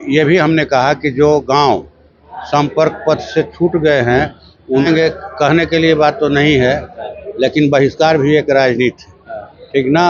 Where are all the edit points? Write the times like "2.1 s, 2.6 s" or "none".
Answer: 4.9 s